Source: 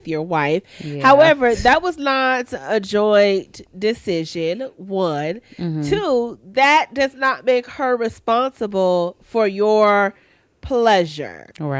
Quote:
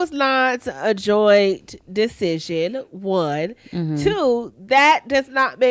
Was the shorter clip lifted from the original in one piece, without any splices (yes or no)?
yes